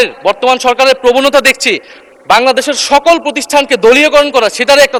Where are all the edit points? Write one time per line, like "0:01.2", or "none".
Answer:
none